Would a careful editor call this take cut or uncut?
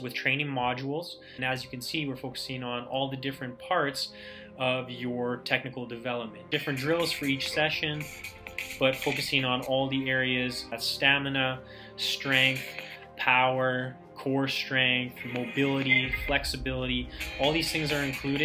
cut